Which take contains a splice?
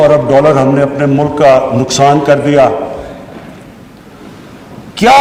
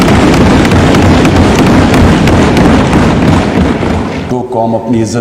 second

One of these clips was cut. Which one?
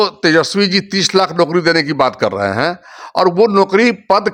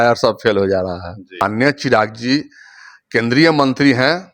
second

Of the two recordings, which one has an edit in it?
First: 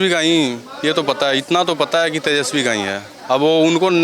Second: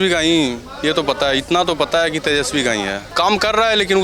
second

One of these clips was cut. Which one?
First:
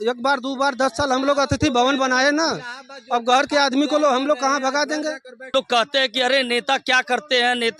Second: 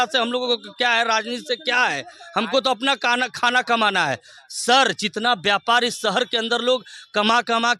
first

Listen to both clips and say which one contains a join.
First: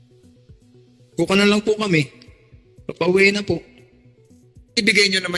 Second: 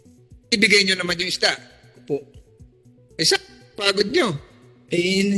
first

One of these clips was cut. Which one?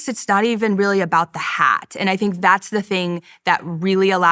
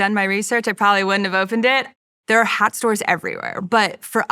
second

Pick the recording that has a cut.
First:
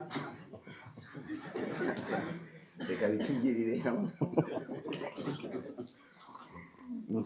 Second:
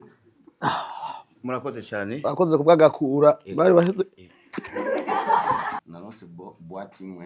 second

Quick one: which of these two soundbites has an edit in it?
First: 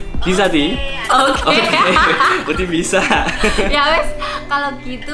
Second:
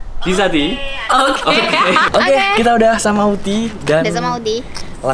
second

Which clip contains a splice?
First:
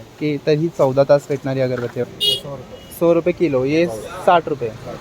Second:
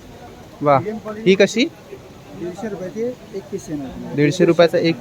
first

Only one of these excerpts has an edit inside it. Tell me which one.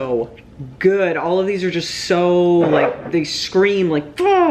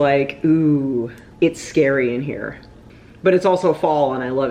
second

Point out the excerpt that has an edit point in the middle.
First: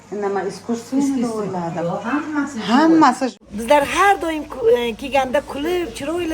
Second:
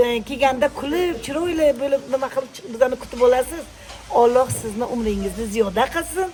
first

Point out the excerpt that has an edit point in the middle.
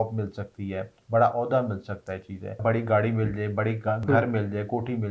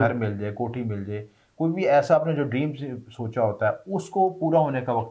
first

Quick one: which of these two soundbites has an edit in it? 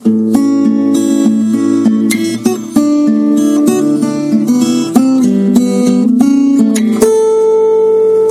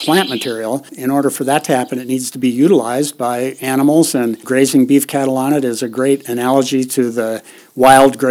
second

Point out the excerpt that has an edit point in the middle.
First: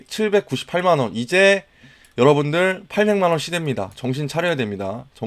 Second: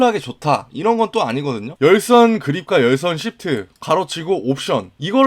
second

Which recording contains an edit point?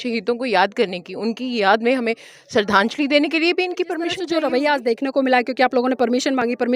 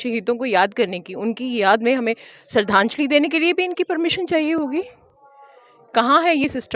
first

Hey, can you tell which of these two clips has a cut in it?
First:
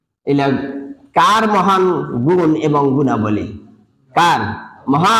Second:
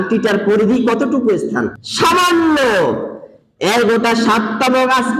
second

